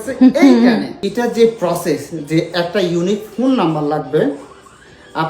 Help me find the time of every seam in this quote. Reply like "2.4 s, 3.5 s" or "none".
1.0 s